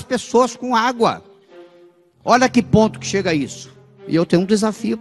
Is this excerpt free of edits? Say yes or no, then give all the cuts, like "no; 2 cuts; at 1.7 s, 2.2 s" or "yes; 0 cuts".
no; 1 cut; at 4.0 s